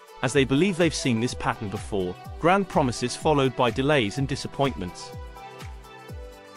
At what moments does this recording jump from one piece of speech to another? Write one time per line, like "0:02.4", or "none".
0:04.9